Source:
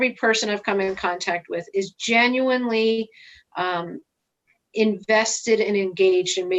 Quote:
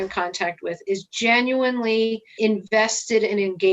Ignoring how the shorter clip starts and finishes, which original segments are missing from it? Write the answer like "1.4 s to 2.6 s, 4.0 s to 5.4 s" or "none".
3.1 s to 4.6 s